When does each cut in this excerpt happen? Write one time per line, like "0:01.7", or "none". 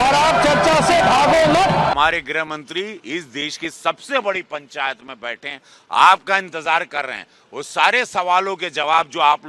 0:01.9